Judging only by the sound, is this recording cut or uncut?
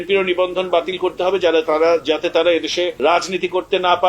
cut